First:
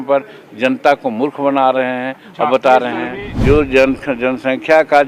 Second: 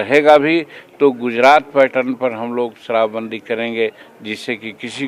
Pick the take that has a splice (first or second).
first